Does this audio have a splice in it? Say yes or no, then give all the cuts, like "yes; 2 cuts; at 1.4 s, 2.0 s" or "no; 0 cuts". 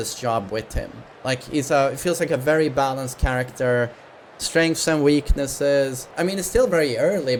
no; 0 cuts